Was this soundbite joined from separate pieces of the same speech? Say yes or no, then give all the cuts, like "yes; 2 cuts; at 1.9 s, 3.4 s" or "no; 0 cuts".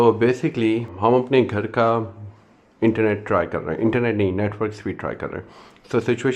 yes; 1 cut; at 0.9 s